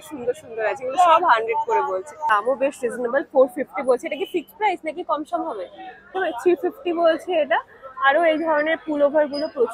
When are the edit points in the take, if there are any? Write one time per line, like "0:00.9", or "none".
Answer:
0:02.3
0:06.1